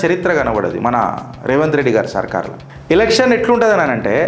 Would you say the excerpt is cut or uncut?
cut